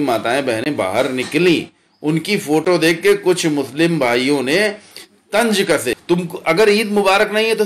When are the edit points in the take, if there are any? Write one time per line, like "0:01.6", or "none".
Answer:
0:06.0